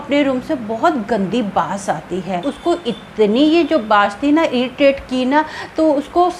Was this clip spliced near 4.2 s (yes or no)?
no